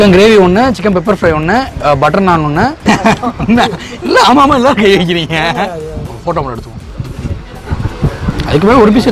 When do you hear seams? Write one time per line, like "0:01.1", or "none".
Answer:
0:02.8
0:06.1